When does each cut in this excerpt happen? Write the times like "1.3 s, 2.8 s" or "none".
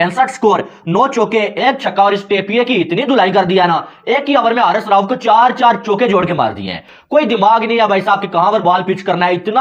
none